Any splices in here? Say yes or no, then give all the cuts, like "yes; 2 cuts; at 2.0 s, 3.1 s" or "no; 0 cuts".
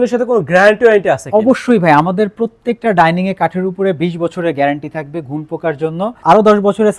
no; 0 cuts